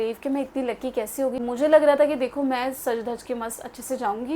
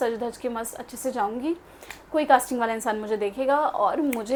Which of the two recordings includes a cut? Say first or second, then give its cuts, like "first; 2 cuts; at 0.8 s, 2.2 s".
first; 1 cut; at 1.4 s